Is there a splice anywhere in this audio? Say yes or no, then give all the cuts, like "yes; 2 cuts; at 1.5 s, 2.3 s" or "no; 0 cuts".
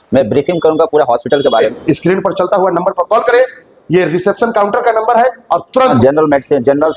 yes; 2 cuts; at 1.7 s, 5.9 s